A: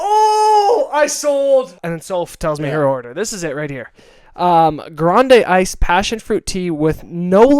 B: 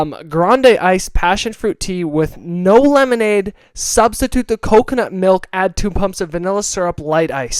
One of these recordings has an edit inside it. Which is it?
A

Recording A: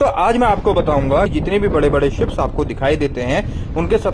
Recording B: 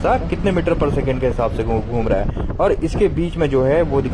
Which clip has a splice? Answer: A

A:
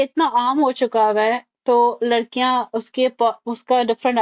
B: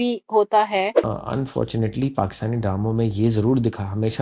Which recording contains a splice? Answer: B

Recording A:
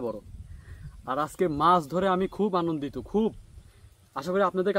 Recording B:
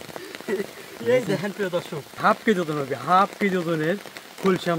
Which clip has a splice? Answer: B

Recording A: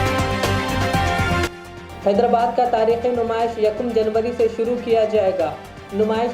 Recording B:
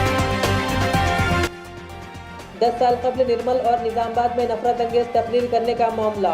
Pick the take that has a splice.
B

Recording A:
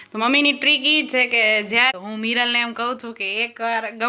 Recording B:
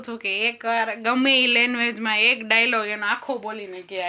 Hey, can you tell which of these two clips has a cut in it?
A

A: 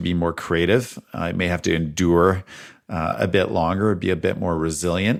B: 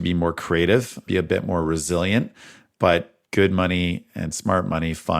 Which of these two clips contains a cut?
B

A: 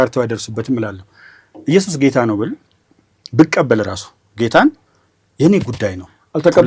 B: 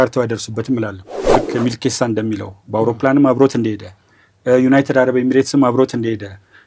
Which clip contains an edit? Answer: B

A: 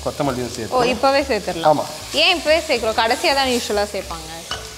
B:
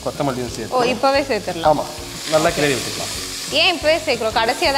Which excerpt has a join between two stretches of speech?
A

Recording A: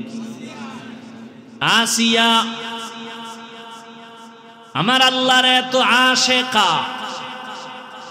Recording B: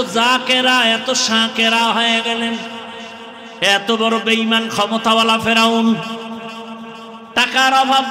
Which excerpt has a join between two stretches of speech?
B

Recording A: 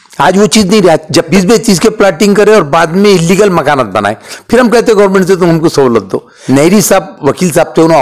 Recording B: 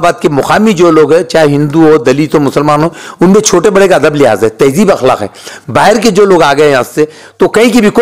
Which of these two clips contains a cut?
A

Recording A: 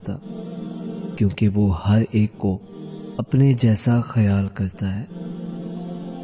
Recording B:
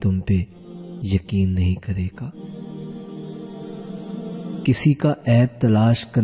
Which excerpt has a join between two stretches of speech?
A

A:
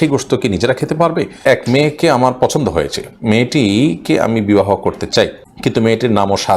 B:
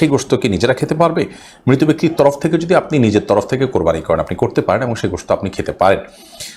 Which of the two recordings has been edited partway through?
A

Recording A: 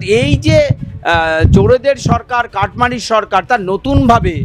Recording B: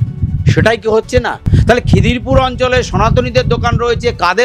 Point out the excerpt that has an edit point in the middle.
B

